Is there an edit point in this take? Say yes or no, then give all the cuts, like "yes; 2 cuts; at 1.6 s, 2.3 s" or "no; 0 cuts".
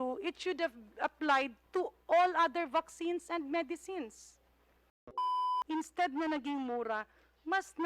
yes; 1 cut; at 5.2 s